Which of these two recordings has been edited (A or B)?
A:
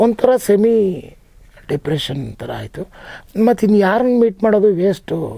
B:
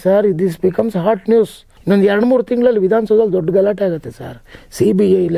B